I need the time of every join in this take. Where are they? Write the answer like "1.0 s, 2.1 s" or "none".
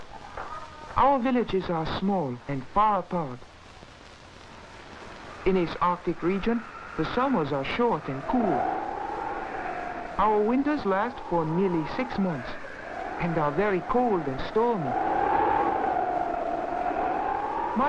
10.6 s